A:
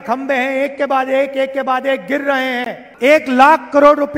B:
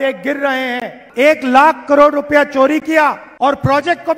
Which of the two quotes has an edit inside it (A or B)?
B